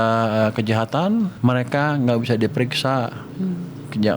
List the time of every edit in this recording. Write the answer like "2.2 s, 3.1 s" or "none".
1.3 s